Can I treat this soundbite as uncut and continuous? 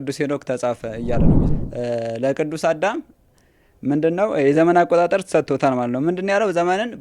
no; 1 cut; at 1.5 s

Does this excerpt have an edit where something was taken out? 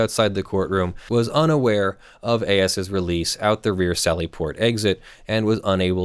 yes; 1 cut; at 1.0 s

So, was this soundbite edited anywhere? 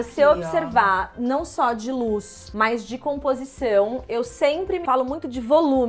no; 0 cuts

